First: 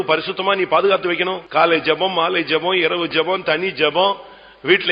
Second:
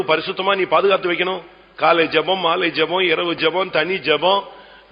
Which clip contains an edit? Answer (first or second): first